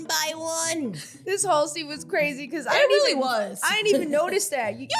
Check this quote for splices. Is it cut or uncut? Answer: cut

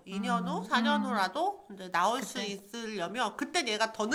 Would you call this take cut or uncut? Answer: uncut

